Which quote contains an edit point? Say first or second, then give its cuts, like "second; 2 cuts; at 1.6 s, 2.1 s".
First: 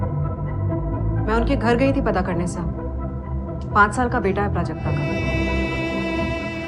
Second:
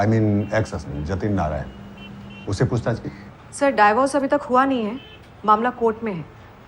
first; 1 cut; at 5.1 s